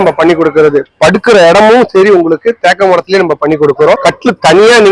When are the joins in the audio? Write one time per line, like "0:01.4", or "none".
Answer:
0:00.9
0:04.0